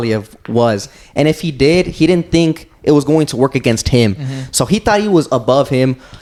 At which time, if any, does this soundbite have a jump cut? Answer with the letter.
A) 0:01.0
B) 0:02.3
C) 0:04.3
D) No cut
D